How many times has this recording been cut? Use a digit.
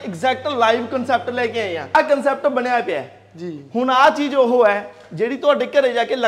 1